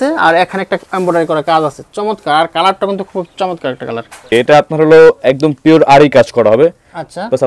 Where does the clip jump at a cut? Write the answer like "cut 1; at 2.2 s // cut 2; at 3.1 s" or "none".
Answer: cut 1; at 4.3 s